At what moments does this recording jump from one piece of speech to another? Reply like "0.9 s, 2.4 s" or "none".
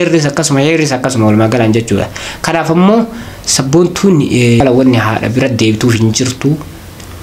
4.5 s